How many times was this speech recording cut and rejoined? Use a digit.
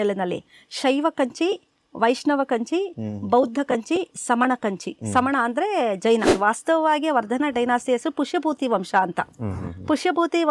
1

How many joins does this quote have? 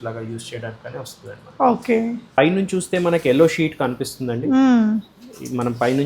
1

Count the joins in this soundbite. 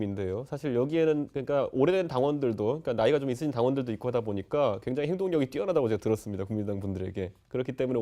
1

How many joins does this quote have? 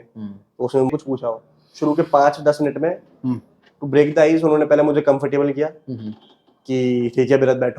1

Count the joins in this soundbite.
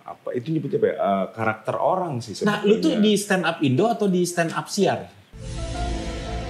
0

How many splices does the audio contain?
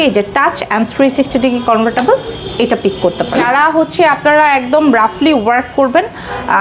1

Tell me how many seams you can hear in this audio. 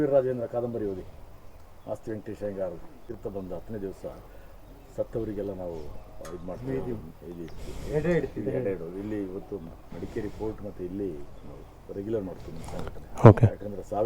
1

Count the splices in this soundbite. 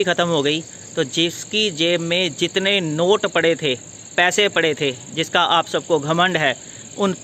0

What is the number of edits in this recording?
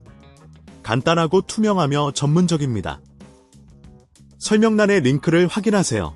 3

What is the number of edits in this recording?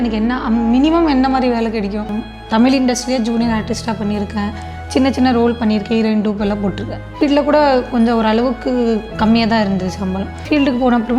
3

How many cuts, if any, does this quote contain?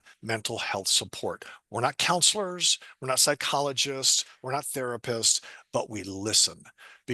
0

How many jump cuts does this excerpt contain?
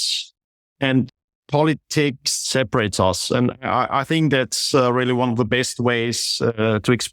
2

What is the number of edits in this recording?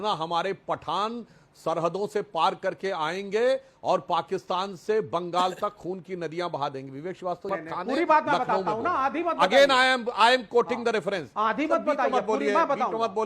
2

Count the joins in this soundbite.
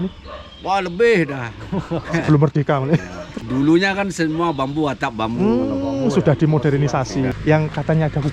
2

